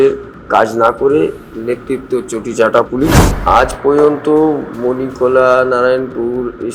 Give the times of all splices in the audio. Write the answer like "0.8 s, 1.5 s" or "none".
3.3 s